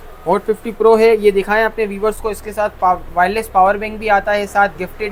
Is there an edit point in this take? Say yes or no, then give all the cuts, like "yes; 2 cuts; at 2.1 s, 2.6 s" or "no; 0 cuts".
no; 0 cuts